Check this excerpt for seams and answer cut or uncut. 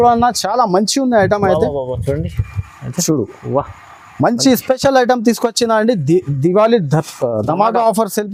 uncut